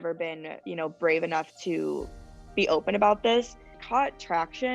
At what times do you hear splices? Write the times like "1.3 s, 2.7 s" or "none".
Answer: 3.7 s